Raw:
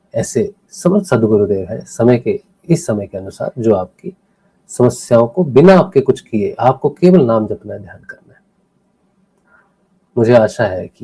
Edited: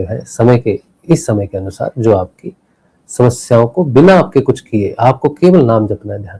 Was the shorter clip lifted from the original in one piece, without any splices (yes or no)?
yes